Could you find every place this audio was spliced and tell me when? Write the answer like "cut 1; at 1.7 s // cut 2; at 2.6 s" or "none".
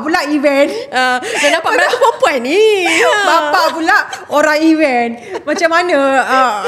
none